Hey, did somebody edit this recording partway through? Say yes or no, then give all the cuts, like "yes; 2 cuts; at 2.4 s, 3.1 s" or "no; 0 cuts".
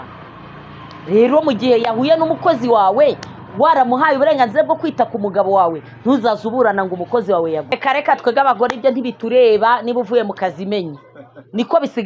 yes; 1 cut; at 7.7 s